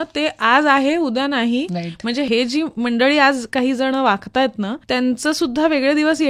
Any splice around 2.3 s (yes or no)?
yes